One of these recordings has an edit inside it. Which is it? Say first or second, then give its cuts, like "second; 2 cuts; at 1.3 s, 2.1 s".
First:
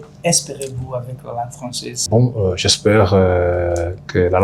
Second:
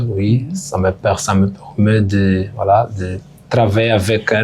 first; 1 cut; at 2.0 s